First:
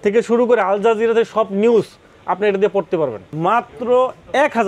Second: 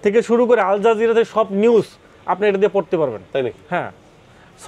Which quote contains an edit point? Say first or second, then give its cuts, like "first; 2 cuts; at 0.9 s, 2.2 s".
first; 1 cut; at 3.2 s